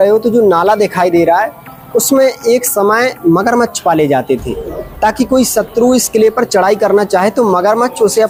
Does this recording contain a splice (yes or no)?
no